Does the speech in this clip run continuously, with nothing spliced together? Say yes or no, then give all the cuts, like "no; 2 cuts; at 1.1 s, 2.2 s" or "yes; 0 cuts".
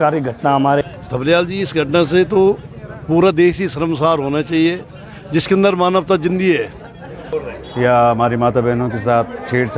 no; 2 cuts; at 0.8 s, 7.3 s